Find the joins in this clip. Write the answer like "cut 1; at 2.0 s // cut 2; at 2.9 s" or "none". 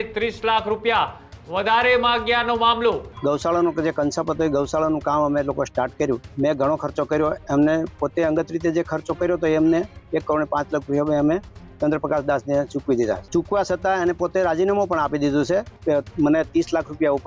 cut 1; at 3.1 s // cut 2; at 6.3 s // cut 3; at 13.2 s // cut 4; at 15.7 s